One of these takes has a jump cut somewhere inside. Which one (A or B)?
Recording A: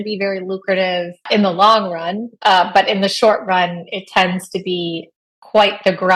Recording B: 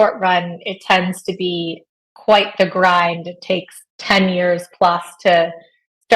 A